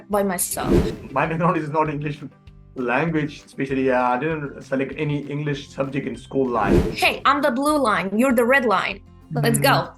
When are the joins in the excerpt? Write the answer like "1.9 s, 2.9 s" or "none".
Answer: 0.9 s, 6.9 s